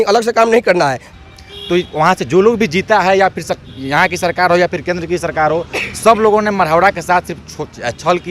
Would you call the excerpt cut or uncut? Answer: cut